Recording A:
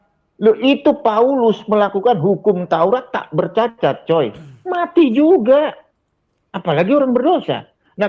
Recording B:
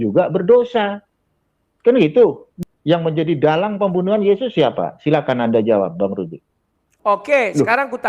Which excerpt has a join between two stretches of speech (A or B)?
B